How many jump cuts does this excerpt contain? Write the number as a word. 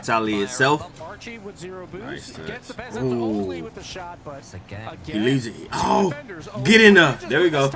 one